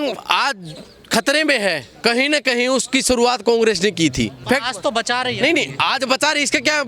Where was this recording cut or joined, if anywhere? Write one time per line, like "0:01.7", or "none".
0:04.4

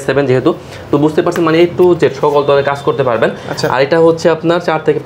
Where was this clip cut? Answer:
none

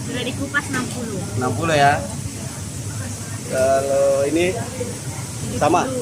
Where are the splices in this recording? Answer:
none

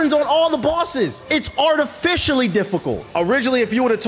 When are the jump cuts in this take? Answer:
0:01.2
0:03.0

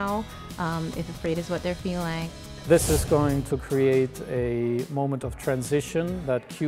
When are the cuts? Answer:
0:02.3

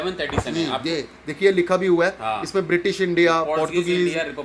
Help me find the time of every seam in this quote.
none

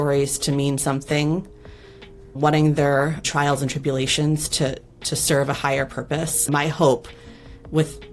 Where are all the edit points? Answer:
0:02.4
0:06.5

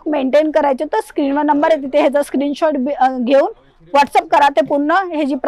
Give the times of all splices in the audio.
none

